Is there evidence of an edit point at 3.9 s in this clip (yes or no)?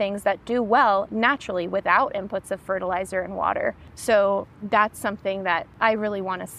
yes